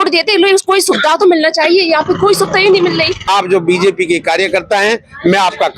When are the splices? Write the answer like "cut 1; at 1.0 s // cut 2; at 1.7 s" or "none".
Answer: cut 1; at 3.2 s